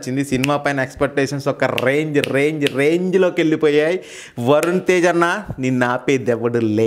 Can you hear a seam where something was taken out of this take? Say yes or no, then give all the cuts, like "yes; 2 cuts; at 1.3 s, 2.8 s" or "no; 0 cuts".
no; 0 cuts